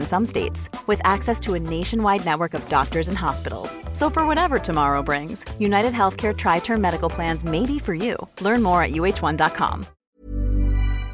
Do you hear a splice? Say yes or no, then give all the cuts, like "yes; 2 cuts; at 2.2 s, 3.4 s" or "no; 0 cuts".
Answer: yes; 1 cut; at 10.0 s